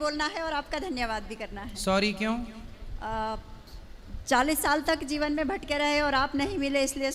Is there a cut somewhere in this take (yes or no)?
no